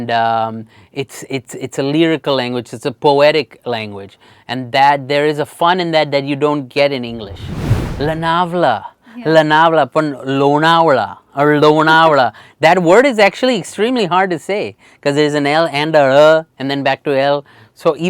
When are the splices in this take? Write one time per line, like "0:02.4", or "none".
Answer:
0:07.8